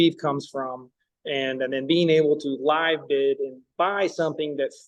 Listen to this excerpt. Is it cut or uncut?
uncut